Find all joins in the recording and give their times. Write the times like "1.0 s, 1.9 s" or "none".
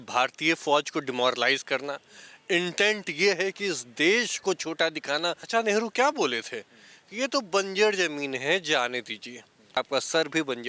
5.5 s, 9.8 s